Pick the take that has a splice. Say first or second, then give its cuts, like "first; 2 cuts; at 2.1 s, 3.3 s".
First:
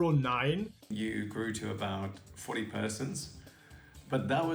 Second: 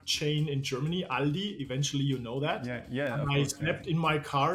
first; 1 cut; at 0.9 s